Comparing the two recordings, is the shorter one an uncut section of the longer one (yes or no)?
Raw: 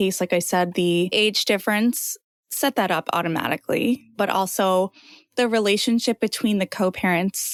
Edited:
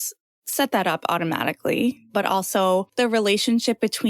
no